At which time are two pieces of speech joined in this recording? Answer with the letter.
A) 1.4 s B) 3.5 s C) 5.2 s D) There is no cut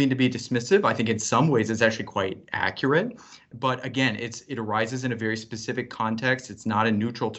B